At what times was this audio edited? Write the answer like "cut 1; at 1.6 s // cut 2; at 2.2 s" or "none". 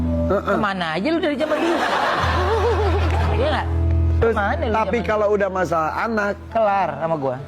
none